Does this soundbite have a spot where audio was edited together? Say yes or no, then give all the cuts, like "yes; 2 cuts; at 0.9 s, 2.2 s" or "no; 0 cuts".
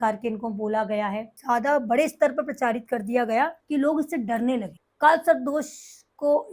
yes; 3 cuts; at 1.3 s, 3.6 s, 4.8 s